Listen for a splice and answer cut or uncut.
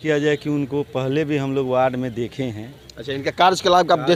uncut